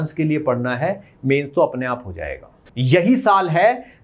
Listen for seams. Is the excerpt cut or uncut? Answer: cut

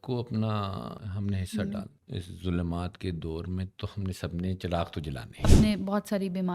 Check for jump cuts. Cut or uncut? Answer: cut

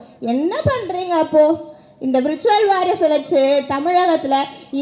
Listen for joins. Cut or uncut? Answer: uncut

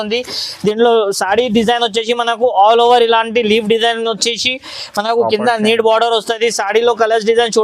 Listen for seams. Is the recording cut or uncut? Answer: uncut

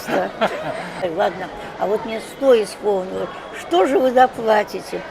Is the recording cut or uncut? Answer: cut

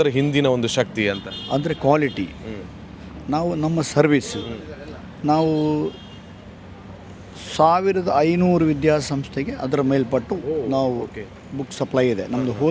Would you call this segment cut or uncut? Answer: uncut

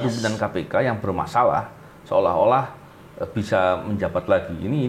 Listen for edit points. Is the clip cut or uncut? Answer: uncut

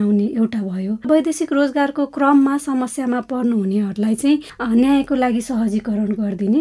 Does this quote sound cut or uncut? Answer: cut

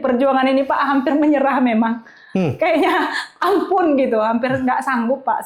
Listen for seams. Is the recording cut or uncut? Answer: uncut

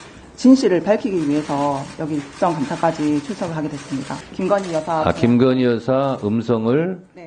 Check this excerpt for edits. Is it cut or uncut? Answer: cut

